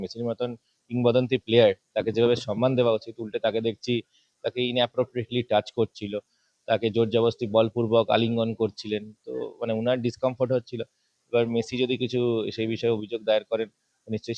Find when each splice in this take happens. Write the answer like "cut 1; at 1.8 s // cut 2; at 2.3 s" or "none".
none